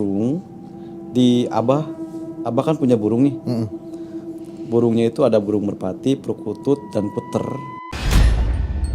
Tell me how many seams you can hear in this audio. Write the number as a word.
one